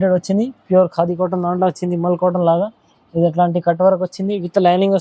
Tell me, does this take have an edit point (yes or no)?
no